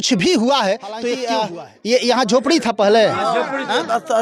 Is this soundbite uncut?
no; 1 cut; at 1.3 s

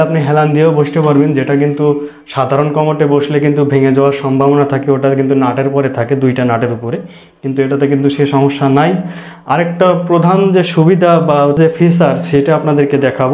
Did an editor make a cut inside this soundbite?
yes; 1 cut; at 11.6 s

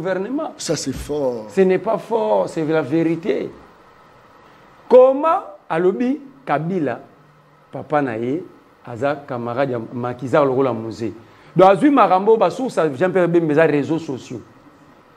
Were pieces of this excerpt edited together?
no; 0 cuts

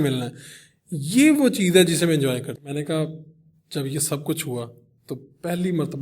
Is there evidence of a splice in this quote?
yes; 1 cut; at 2.6 s

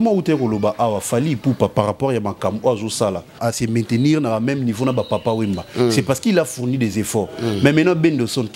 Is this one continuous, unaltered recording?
no; 1 cut; at 3.4 s

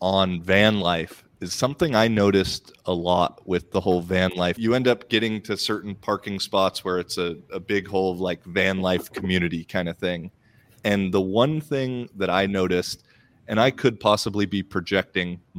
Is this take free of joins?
no; 1 cut; at 4.6 s

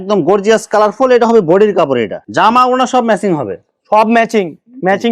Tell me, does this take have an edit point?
yes; 1 cut; at 2.2 s

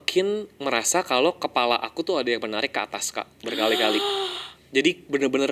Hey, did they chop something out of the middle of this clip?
no; 0 cuts

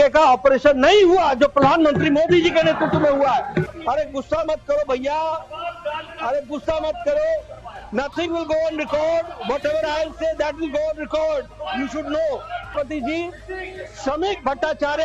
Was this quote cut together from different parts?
yes; 2 cuts; at 3.7 s, 12.7 s

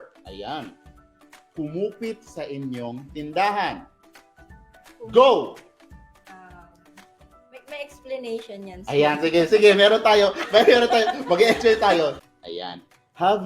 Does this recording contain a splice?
yes; 1 cut; at 12.2 s

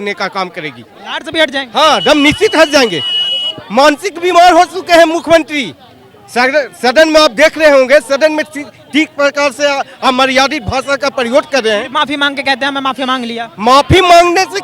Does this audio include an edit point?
no; 0 cuts

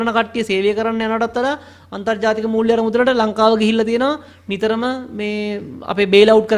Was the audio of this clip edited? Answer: no; 0 cuts

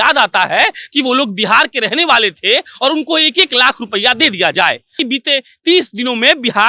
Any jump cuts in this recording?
yes; 1 cut; at 5.0 s

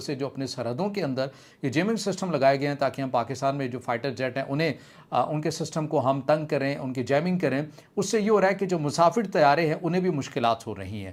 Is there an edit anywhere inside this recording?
no; 0 cuts

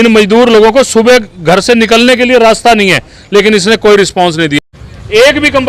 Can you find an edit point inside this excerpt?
yes; 1 cut; at 4.6 s

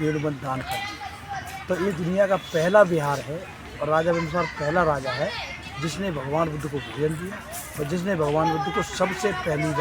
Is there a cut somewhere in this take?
no; 0 cuts

